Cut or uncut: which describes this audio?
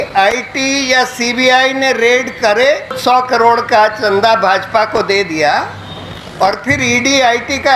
cut